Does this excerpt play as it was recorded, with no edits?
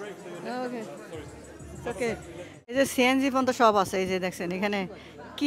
no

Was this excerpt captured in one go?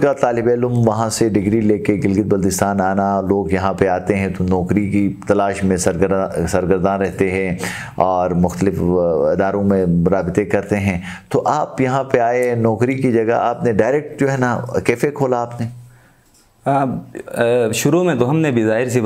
yes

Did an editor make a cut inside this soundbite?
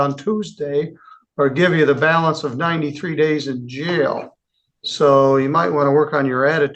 no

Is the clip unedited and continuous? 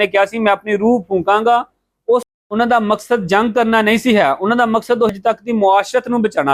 no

